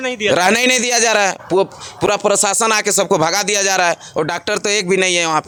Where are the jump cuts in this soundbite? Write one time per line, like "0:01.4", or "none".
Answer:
none